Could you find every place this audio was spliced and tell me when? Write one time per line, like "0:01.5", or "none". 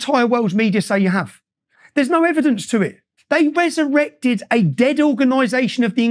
0:03.1